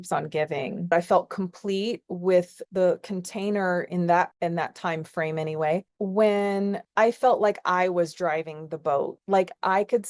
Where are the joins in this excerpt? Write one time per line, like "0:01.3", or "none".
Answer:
0:00.9
0:02.6
0:05.9